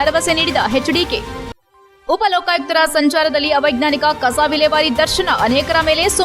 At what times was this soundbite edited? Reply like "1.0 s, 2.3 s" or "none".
none